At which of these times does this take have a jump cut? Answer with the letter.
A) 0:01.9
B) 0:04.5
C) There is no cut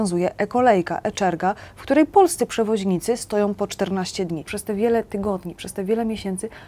B